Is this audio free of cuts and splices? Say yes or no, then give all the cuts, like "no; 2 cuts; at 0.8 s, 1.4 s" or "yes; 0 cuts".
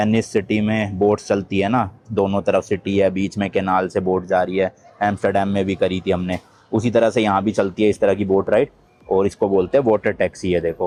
yes; 0 cuts